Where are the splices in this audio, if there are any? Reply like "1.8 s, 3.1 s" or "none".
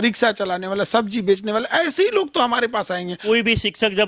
3.1 s